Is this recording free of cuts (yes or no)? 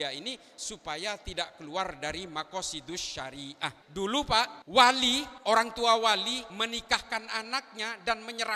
no